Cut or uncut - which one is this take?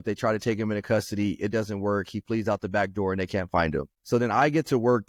uncut